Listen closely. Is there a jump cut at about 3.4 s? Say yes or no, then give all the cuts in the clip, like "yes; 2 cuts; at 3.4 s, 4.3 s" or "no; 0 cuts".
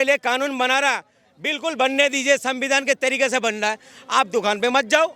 no; 0 cuts